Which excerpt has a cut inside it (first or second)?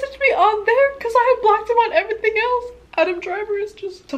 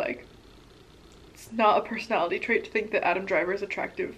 first